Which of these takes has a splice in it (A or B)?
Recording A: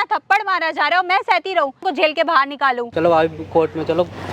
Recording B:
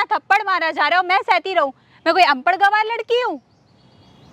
A